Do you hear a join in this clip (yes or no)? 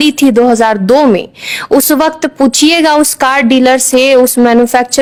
no